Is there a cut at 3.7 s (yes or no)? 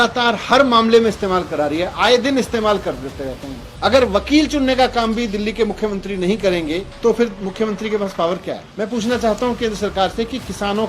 yes